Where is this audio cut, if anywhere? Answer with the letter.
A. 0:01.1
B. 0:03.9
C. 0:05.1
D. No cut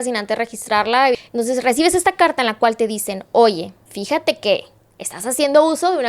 A